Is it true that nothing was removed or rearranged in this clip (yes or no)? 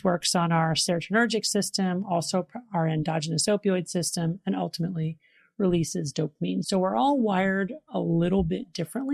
no